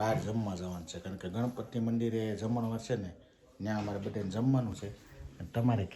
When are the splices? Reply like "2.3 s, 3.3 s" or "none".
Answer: none